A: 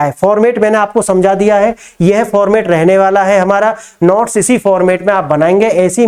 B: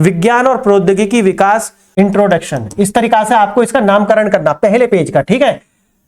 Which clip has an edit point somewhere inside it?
B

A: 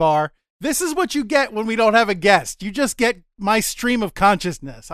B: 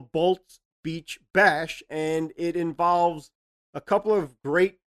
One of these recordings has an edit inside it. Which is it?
B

